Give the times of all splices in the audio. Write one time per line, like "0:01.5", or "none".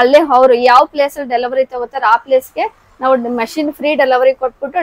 none